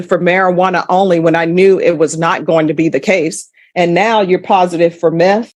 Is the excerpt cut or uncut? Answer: uncut